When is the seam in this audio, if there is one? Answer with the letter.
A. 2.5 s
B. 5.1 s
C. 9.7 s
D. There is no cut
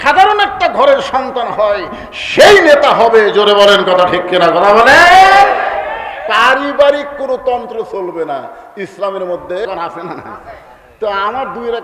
C